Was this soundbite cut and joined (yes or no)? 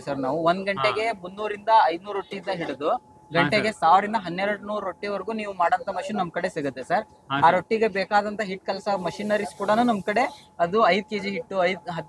no